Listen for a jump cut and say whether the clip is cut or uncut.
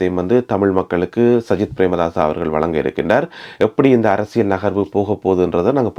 uncut